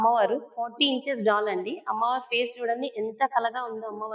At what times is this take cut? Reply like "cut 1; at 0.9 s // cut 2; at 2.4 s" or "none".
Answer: none